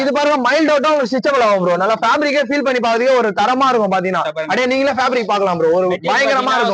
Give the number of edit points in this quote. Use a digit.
0